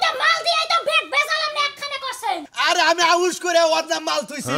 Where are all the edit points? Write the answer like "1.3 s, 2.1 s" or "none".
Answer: 2.5 s